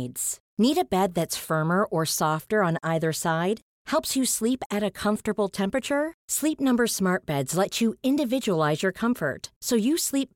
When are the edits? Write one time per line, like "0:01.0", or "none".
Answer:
none